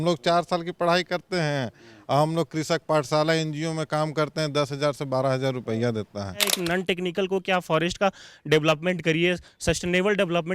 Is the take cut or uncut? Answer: cut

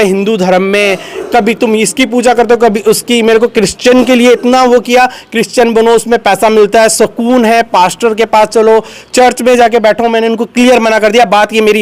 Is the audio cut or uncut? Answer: uncut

